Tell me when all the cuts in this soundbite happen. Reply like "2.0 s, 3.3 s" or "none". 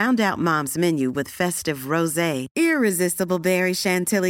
none

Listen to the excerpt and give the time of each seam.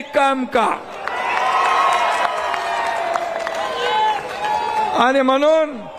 none

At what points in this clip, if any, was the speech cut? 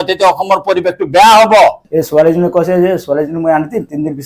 1.8 s

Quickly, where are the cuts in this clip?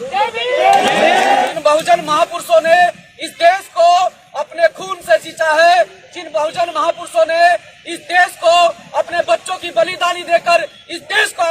1.5 s

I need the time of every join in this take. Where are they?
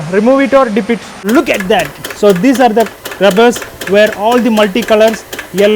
1.3 s

